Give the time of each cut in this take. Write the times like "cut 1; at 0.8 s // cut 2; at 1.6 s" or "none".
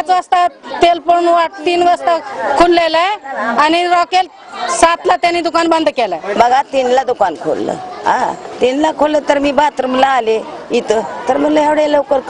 cut 1; at 6.3 s